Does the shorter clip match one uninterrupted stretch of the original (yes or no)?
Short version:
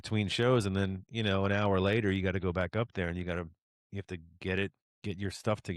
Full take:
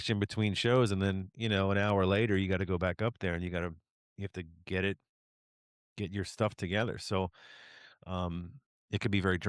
no